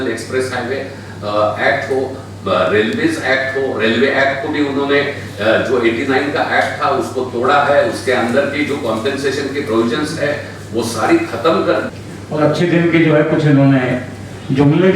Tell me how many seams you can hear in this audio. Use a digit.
1